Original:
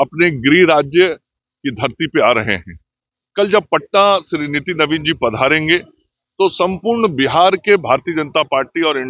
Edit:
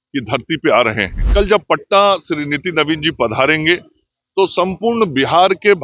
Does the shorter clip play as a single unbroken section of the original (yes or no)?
no